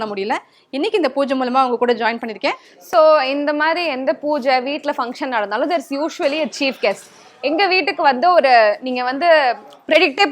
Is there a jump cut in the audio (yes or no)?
yes